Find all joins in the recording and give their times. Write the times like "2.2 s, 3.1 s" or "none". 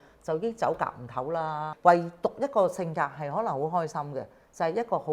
1.7 s